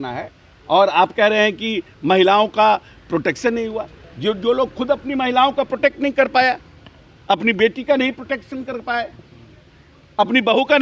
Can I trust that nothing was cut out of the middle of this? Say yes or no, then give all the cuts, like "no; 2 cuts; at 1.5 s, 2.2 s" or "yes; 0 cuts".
yes; 0 cuts